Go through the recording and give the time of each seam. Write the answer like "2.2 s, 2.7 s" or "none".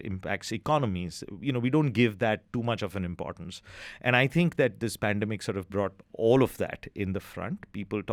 none